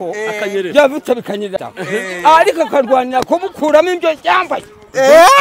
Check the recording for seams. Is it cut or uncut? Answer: cut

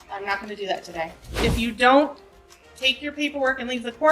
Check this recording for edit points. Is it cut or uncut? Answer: cut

